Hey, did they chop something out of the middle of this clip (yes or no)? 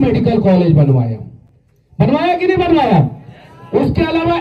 no